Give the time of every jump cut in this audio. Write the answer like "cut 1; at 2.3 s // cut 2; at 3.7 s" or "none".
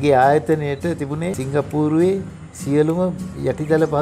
cut 1; at 1.4 s